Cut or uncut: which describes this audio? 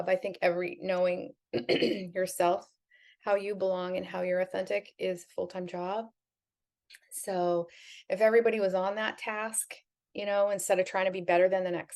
uncut